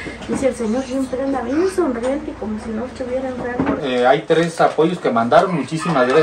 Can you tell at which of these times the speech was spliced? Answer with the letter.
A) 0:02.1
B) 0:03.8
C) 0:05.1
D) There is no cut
B